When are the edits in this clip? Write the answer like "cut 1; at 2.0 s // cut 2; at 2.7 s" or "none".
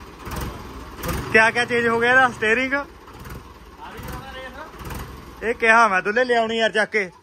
none